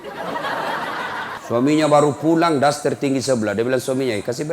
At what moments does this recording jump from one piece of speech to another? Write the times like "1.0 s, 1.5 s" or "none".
1.4 s